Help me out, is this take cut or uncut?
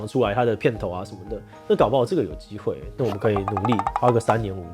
uncut